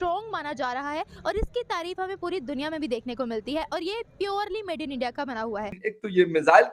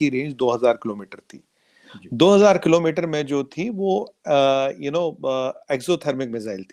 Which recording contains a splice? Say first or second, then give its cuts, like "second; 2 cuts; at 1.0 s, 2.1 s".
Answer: first; 1 cut; at 5.8 s